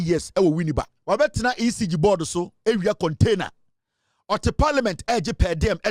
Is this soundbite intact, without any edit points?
no; 1 cut; at 0.9 s

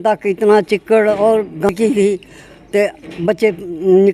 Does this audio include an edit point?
yes; 1 cut; at 1.7 s

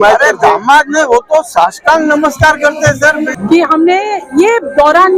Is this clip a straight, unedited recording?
no; 1 cut; at 3.3 s

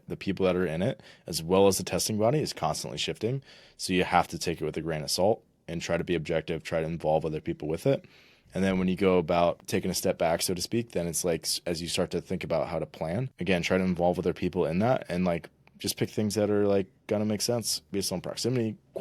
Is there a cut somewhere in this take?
yes; 3 cuts; at 9.6 s, 13.3 s, 17.8 s

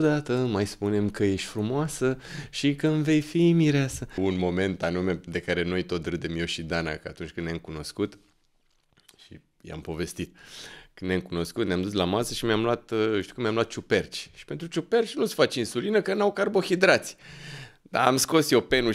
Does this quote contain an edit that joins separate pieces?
yes; 1 cut; at 4.2 s

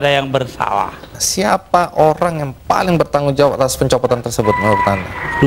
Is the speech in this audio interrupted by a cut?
yes; 1 cut; at 1.2 s

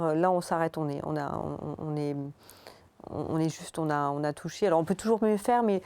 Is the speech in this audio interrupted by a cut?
no; 0 cuts

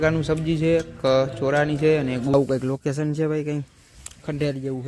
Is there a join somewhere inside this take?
yes; 1 cut; at 2.3 s

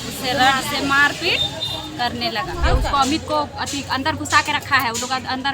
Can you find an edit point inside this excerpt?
yes; 1 cut; at 2.6 s

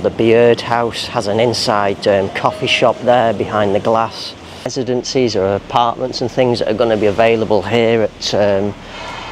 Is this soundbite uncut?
no; 1 cut; at 4.7 s

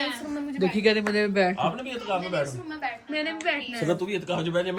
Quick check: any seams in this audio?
no; 0 cuts

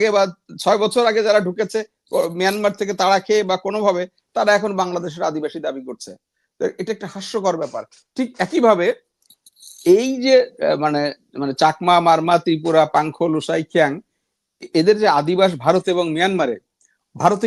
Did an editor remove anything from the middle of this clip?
no; 0 cuts

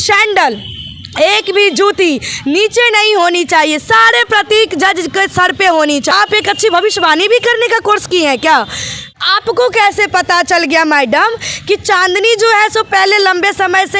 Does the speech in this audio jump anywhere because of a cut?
yes; 2 cuts; at 6.1 s, 9.1 s

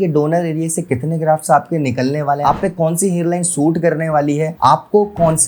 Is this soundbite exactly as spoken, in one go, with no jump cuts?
no; 1 cut; at 2.4 s

